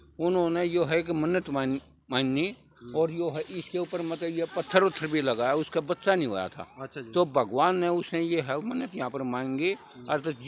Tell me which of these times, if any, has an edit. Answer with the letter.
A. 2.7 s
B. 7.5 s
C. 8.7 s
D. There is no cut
D